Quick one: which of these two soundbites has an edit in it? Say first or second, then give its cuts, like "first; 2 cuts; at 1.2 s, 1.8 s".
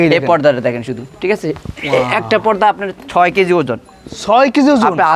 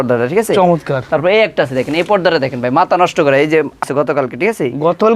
second; 1 cut; at 3.8 s